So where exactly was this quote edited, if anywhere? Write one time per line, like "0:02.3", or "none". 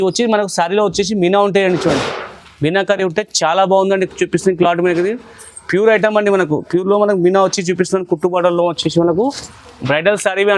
none